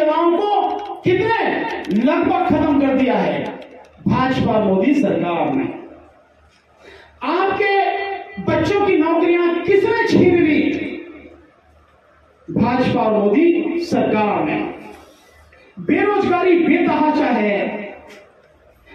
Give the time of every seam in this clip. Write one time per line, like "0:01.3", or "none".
none